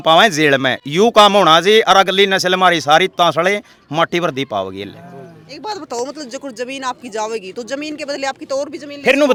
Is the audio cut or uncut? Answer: uncut